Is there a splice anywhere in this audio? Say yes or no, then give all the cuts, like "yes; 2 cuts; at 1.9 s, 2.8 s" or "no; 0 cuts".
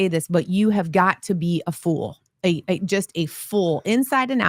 no; 0 cuts